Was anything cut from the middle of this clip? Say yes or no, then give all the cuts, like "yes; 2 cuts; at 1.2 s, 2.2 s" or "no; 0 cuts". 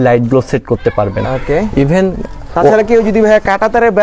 no; 0 cuts